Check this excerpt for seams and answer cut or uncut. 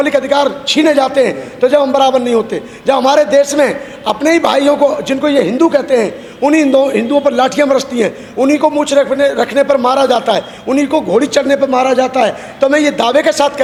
uncut